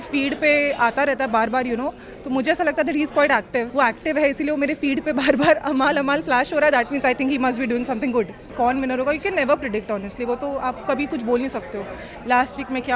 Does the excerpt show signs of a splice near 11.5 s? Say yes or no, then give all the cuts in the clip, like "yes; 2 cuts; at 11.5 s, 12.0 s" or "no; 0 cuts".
no; 2 cuts; at 3.7 s, 8.5 s